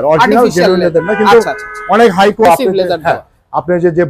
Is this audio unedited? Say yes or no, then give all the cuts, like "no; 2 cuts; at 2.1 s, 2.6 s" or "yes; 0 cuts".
no; 1 cut; at 2.4 s